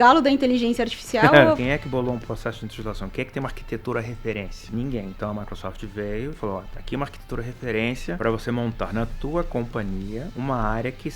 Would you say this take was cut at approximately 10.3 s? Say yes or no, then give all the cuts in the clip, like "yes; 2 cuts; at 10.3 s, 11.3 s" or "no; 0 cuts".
yes; 4 cuts; at 1.6 s, 4.6 s, 8.2 s, 10.3 s